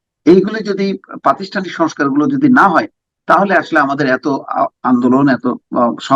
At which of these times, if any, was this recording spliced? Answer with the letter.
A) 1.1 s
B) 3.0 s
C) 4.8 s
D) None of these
D